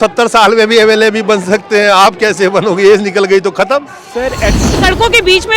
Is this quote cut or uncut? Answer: cut